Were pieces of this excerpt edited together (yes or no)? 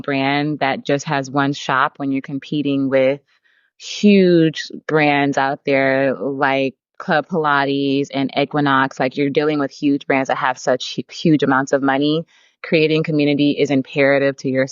yes